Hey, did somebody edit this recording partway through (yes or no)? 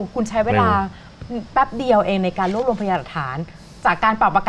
no